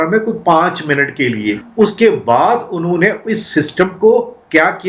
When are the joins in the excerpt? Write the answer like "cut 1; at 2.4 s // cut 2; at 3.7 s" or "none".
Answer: cut 1; at 1.6 s